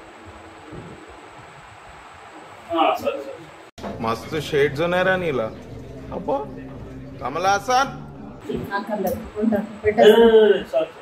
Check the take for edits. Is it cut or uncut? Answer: uncut